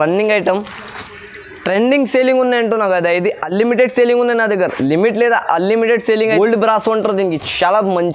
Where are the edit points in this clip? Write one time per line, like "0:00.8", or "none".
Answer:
0:06.3